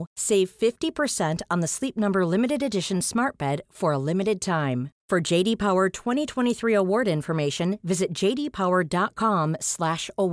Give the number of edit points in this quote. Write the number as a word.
zero